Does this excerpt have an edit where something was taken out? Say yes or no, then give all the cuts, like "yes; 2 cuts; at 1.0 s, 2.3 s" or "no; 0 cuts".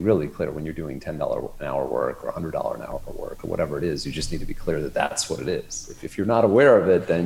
no; 0 cuts